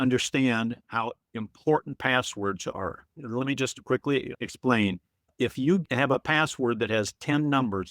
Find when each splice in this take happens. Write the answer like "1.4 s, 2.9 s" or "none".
3.2 s